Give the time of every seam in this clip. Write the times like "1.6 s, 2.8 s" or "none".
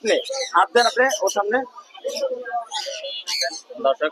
none